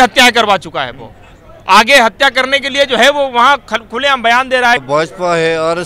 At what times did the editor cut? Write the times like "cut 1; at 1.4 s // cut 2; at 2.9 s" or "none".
cut 1; at 4.8 s